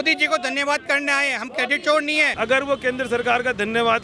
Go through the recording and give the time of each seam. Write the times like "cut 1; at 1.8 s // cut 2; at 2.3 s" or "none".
cut 1; at 2.3 s